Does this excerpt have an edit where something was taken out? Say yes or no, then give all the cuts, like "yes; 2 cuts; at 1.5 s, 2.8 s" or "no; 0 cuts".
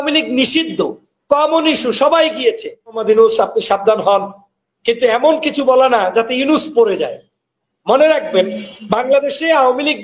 yes; 1 cut; at 3.0 s